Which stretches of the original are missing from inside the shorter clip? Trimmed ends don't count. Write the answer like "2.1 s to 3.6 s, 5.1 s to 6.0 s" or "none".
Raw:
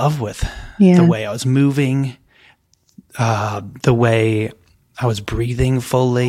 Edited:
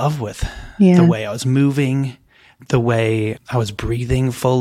2.5 s to 3.7 s, 4.6 s to 4.9 s